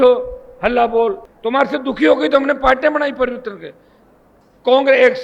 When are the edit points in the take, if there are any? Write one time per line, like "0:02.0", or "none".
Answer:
0:01.3

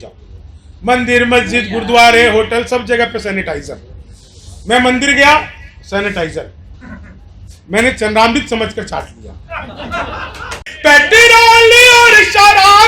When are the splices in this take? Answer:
0:10.6

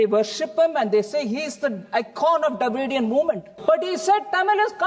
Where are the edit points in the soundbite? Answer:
0:03.5

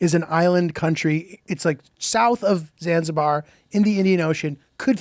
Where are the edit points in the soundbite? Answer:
none

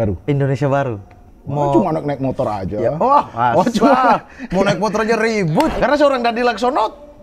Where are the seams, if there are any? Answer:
0:05.7

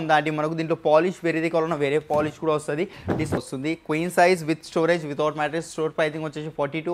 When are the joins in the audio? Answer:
0:03.4

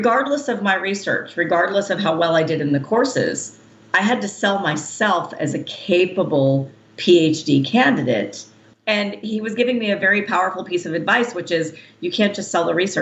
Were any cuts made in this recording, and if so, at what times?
0:08.8

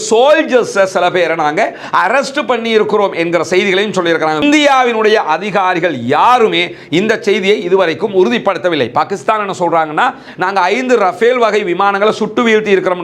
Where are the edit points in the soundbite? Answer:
none

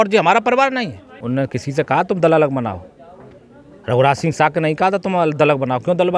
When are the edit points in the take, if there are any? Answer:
0:01.2

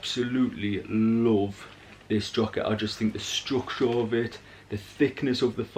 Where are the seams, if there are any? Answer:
none

